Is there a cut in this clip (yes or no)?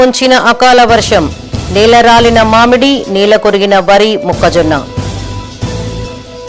no